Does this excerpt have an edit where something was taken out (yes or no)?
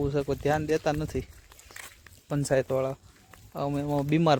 no